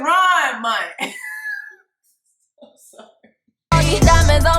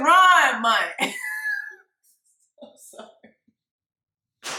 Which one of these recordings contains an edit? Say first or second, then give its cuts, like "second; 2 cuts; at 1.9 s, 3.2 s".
first; 1 cut; at 3.5 s